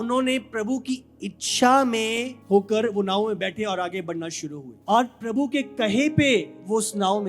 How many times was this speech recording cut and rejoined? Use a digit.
2